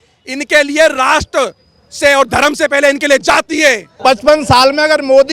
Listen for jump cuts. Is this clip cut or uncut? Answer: cut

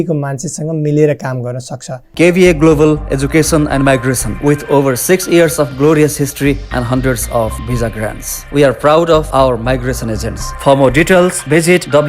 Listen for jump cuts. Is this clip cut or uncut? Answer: cut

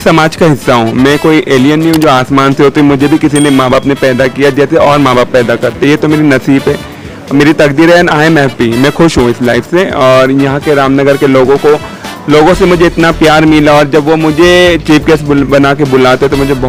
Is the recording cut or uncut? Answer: uncut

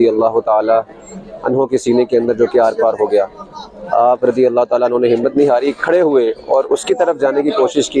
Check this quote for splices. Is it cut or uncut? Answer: uncut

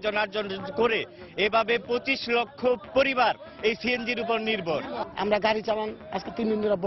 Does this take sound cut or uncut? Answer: cut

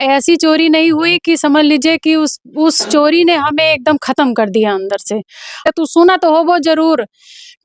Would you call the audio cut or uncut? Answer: cut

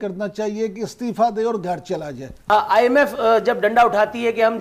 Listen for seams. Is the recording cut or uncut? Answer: cut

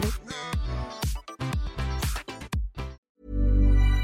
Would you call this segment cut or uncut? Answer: cut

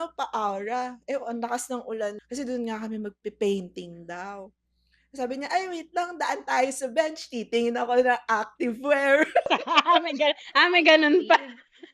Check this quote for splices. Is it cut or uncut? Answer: cut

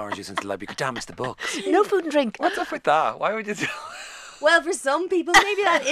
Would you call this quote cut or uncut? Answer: cut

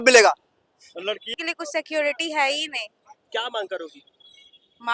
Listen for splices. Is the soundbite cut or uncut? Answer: cut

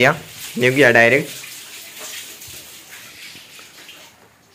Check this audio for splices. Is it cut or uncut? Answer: uncut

